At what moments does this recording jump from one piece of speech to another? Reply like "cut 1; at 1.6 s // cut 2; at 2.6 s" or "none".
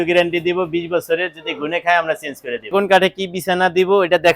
cut 1; at 2.7 s